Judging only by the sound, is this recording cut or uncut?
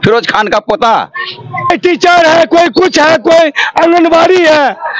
cut